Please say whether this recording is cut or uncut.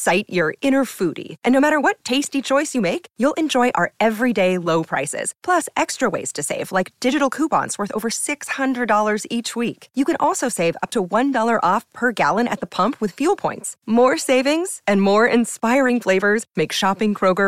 uncut